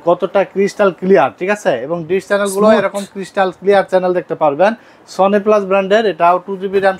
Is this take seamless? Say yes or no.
yes